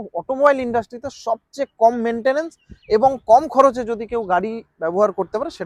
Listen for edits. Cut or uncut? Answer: uncut